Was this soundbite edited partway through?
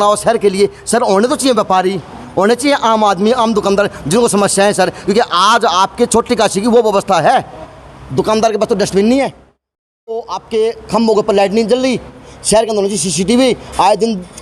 no; 0 cuts

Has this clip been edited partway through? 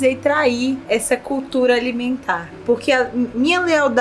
yes; 2 cuts; at 0.8 s, 2.6 s

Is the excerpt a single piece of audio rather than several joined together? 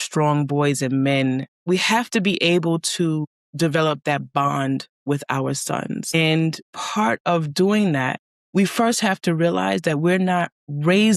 no; 1 cut; at 1.5 s

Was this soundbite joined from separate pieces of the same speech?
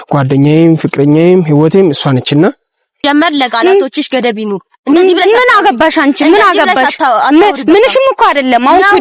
yes; 1 cut; at 3.0 s

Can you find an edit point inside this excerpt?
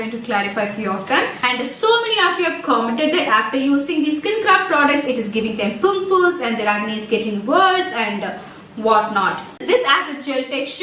yes; 2 cuts; at 1.4 s, 9.6 s

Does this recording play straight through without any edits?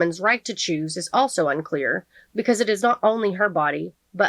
yes; 0 cuts

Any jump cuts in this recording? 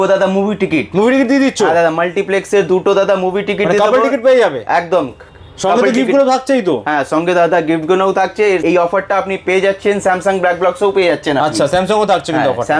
no; 0 cuts

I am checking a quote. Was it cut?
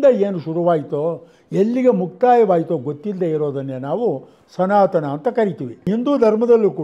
no; 0 cuts

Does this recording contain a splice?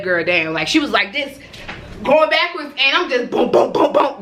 no; 0 cuts

